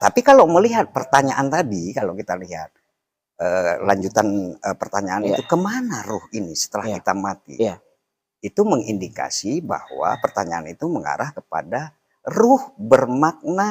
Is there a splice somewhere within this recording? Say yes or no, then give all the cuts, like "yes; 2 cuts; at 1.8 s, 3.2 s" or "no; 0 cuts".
yes; 1 cut; at 1.0 s